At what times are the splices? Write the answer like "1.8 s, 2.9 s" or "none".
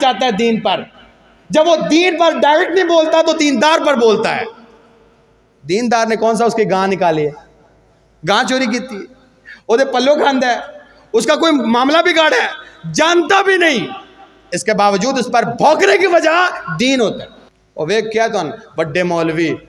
none